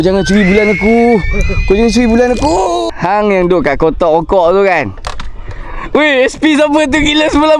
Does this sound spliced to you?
yes; 1 cut; at 2.9 s

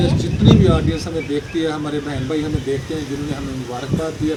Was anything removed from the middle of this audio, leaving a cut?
no; 0 cuts

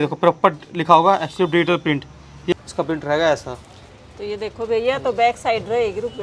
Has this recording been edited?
yes; 1 cut; at 2.5 s

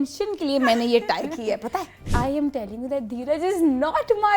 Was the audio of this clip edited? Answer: yes; 1 cut; at 2.0 s

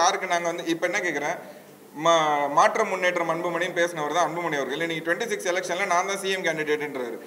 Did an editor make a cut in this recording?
no; 0 cuts

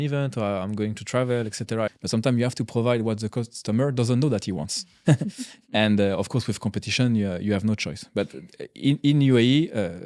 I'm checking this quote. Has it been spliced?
yes; 1 cut; at 1.9 s

